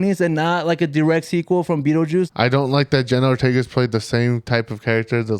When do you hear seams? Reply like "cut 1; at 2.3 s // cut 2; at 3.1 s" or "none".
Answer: cut 1; at 2.3 s